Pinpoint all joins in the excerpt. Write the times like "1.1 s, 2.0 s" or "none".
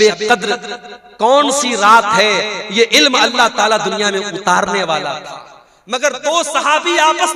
none